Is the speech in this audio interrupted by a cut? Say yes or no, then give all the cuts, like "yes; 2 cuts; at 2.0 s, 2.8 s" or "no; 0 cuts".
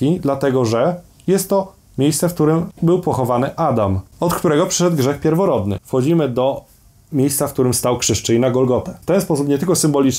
yes; 4 cuts; at 2.7 s, 4.1 s, 5.8 s, 9.0 s